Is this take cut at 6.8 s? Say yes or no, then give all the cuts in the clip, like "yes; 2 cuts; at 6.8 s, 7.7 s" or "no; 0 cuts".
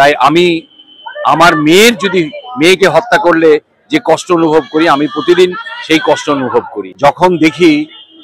yes; 1 cut; at 6.8 s